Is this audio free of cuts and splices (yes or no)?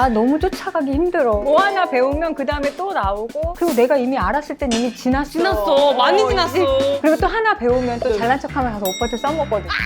no